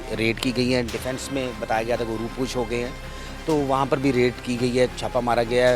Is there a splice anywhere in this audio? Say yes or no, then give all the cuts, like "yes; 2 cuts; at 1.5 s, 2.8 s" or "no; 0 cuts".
no; 0 cuts